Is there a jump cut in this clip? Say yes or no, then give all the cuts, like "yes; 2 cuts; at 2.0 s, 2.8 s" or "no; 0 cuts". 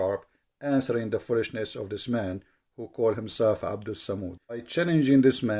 yes; 1 cut; at 4.7 s